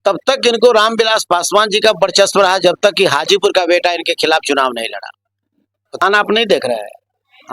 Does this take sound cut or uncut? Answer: cut